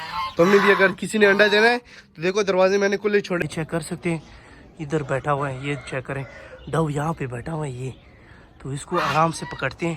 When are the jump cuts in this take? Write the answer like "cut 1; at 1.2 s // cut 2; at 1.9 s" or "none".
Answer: cut 1; at 3.4 s

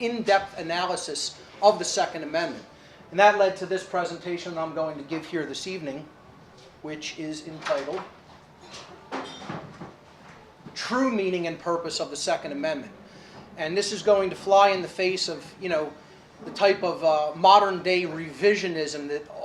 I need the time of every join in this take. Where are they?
cut 1; at 17.7 s

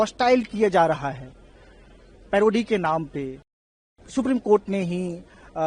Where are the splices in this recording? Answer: cut 1; at 3.9 s

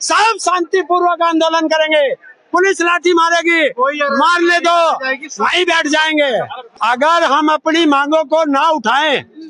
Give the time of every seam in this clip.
cut 1; at 6.7 s

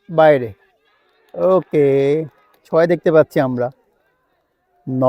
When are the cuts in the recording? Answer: none

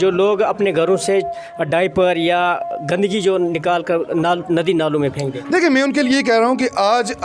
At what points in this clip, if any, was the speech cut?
none

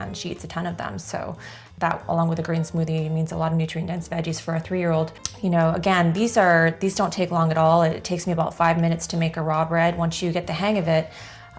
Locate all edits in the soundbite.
cut 1; at 1.6 s // cut 2; at 5.2 s

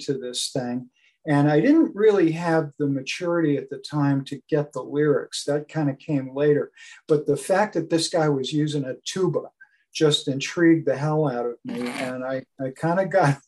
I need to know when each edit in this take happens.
none

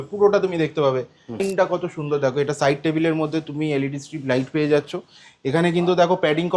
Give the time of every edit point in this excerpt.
cut 1; at 1.4 s

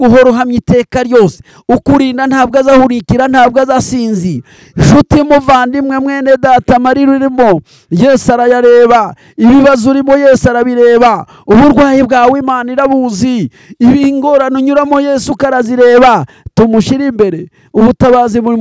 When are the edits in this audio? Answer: cut 1; at 1.5 s

